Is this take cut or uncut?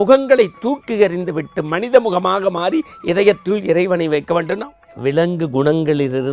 cut